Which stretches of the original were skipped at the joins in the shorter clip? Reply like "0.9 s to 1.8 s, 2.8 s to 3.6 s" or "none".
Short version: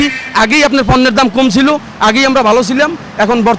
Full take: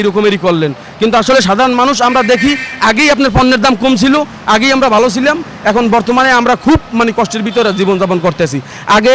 none